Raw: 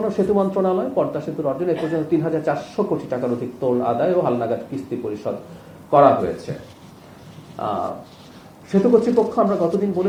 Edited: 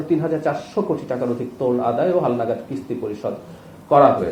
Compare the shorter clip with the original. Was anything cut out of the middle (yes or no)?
no